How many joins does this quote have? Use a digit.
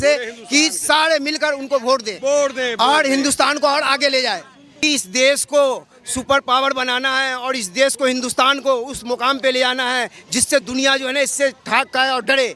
1